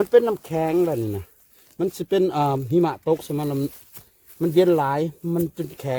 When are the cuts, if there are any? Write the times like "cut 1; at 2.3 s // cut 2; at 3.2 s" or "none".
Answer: none